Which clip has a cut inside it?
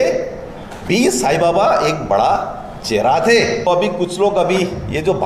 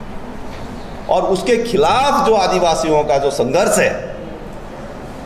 first; 1 cut; at 3.7 s

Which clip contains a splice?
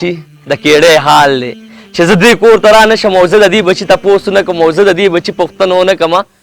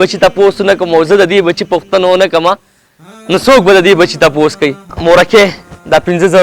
second; 1 cut; at 4.9 s

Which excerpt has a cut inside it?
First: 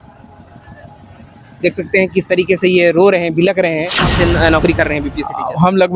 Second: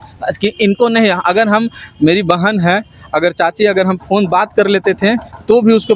first; 1 cut; at 4.1 s

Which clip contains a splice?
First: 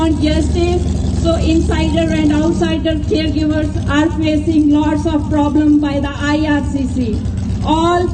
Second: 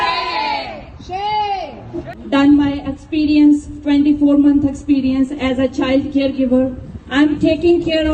second; 1 cut; at 2.1 s

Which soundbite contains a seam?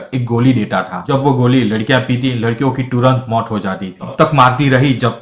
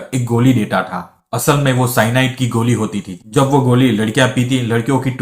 first; 2 cuts; at 1.0 s, 4.1 s

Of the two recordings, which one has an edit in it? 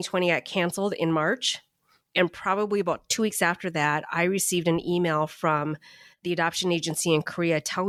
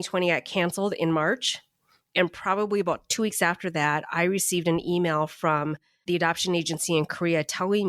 second; 1 cut; at 5.9 s

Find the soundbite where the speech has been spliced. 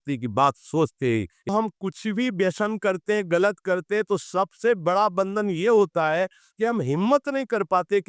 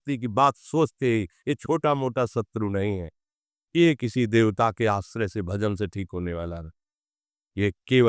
first; 1 cut; at 1.5 s

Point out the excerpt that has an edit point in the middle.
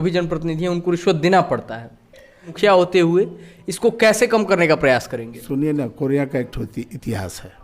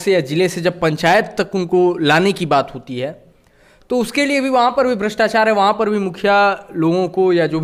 first; 1 cut; at 2.5 s

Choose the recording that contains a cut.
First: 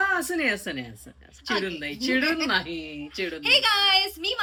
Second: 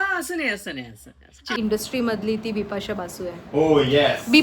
second; 1 cut; at 1.6 s

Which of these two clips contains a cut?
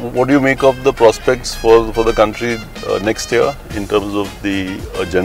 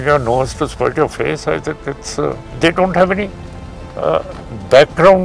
second; 1 cut; at 2.5 s

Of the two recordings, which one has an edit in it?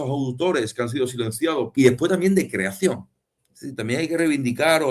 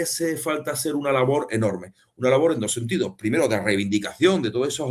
first; 1 cut; at 1.7 s

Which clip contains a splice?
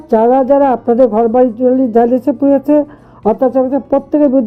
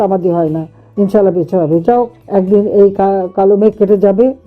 second; 1 cut; at 2.2 s

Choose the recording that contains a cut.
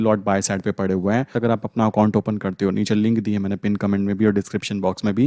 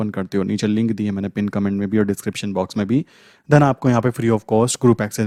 first; 1 cut; at 1.3 s

